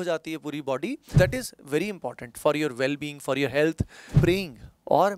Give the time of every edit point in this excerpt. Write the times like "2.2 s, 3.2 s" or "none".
1.0 s, 4.0 s